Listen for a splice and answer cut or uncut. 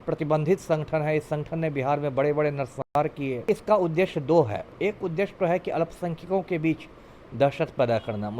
cut